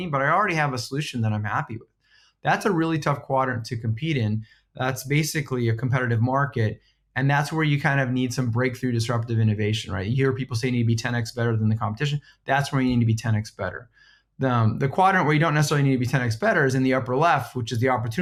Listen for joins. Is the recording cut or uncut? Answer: uncut